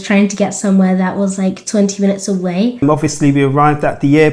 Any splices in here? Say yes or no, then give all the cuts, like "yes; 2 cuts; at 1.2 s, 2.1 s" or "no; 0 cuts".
yes; 1 cut; at 2.8 s